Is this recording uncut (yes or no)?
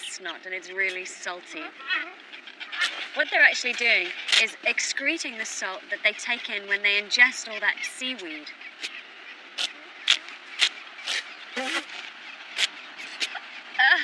yes